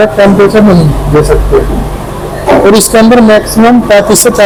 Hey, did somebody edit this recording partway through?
no; 0 cuts

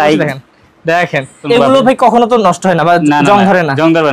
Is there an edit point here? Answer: yes; 1 cut; at 1.4 s

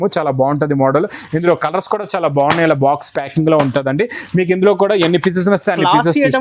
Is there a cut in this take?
no; 0 cuts

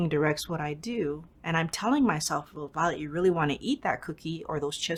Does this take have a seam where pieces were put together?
no; 0 cuts

